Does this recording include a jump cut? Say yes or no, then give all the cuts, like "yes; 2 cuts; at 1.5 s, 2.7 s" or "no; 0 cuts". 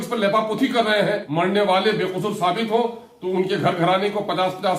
yes; 1 cut; at 1.2 s